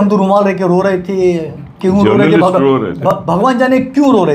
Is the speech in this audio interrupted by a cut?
no; 0 cuts

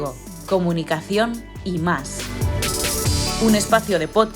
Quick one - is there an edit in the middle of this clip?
yes; 2 cuts; at 2.1 s, 3.4 s

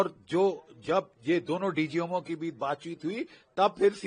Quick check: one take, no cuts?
yes; 0 cuts

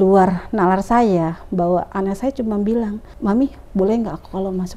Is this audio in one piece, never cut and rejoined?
no; 1 cut; at 3.0 s

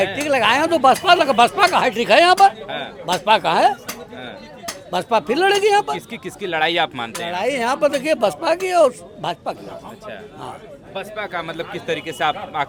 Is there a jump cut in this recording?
no; 0 cuts

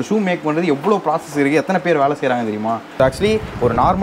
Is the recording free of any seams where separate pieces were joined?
no; 1 cut; at 2.9 s

